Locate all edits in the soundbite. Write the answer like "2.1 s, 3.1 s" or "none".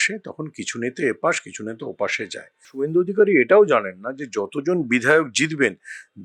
2.7 s